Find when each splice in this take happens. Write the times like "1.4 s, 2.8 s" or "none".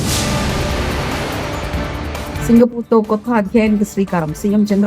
2.4 s